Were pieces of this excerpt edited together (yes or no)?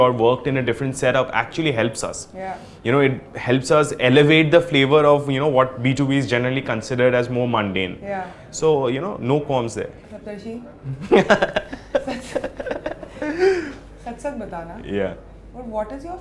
no